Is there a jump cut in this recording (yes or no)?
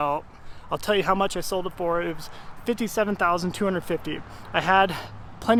no